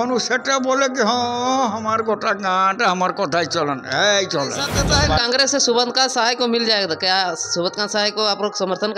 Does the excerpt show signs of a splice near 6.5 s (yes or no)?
no